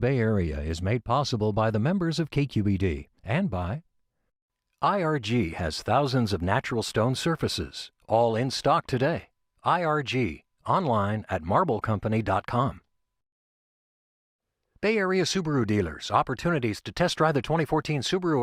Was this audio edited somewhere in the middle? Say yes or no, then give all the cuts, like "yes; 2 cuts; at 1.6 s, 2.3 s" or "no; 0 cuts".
no; 0 cuts